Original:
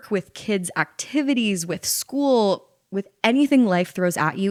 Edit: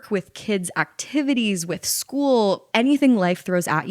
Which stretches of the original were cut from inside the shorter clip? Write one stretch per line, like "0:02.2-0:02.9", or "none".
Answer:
0:02.6-0:03.1